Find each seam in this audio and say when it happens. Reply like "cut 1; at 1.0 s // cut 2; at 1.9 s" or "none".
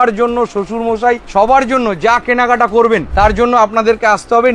cut 1; at 1.2 s